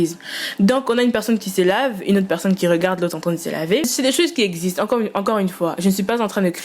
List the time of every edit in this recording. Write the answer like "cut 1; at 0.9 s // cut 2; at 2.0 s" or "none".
cut 1; at 3.9 s